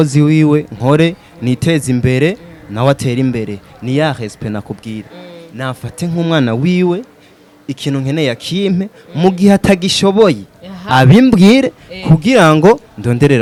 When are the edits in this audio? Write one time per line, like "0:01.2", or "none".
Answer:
none